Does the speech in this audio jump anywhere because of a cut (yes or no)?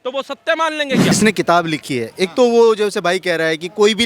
yes